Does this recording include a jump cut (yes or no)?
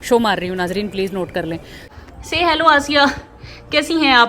yes